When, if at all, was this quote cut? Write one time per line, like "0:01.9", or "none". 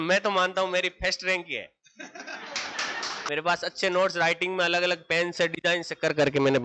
0:03.1

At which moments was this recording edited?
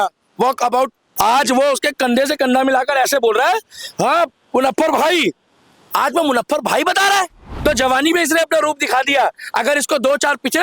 0:01.0
0:07.4

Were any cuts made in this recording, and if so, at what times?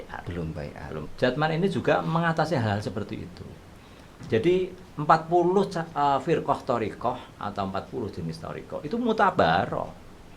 0:01.1

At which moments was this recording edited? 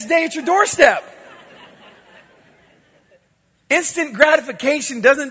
0:03.1

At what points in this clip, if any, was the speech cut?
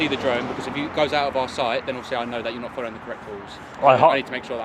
0:03.7

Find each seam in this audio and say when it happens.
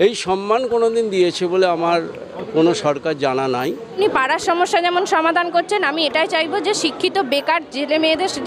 0:03.9

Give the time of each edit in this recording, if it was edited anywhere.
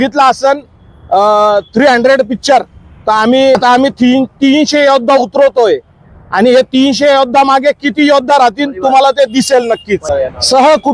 0:03.5
0:10.1

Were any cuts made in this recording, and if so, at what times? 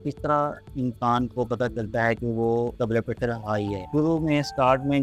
none

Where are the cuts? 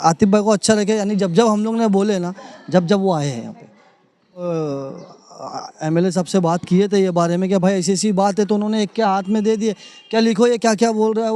0:04.4

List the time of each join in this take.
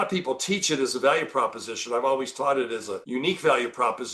0:03.0

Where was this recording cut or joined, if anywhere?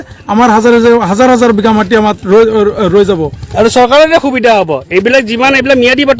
none

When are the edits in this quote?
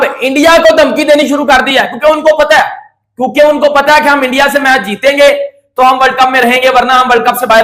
none

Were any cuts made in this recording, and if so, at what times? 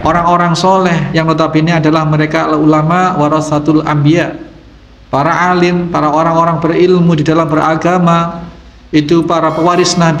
0:01.1

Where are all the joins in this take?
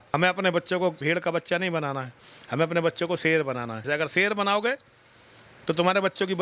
0:01.0
0:03.9

